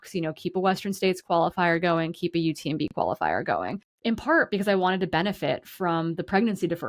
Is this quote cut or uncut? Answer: cut